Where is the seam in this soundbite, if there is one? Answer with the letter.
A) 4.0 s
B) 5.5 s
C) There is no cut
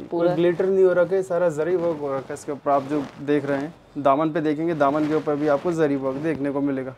C